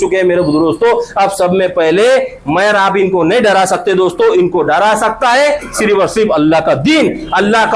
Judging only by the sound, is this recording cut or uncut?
uncut